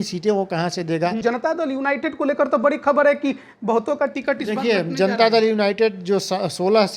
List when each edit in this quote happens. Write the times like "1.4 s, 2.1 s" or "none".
1.2 s